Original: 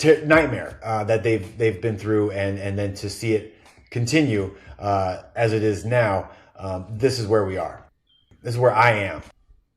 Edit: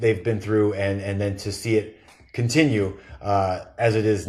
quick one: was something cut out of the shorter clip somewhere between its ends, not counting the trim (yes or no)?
no